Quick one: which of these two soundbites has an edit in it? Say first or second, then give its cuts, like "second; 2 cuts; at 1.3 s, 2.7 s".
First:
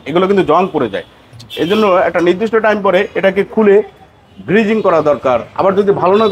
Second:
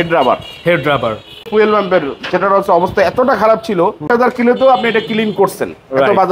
second; 2 cuts; at 1.4 s, 4.1 s